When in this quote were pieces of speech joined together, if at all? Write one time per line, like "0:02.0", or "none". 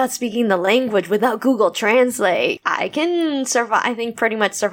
0:02.6

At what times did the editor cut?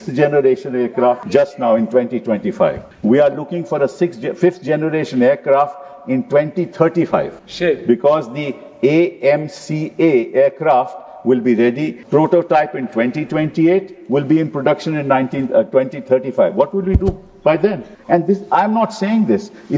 0:01.2
0:02.9
0:07.4
0:11.9
0:17.9

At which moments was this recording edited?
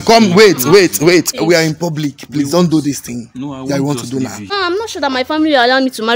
0:01.3
0:04.5

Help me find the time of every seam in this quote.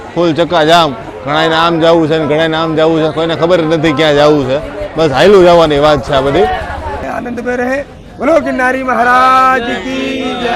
0:07.0

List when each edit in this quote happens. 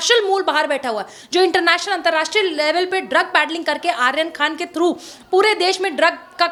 none

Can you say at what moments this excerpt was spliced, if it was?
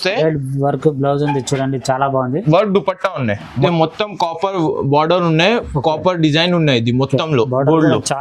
0:03.5

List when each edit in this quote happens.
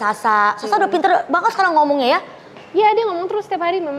none

